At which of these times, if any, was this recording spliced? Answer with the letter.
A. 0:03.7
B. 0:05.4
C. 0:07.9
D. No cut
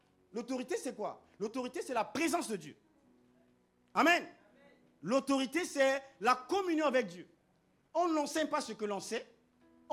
D